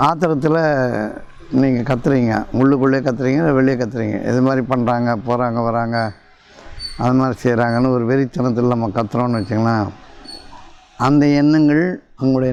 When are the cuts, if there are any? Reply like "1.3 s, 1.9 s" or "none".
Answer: none